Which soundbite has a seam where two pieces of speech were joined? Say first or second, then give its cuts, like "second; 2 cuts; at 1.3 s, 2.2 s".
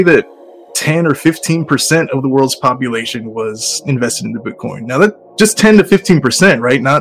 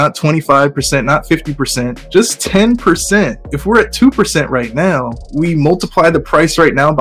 second; 3 cuts; at 2.0 s, 3.5 s, 5.2 s